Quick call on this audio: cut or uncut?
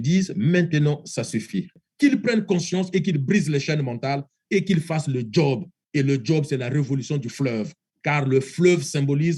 cut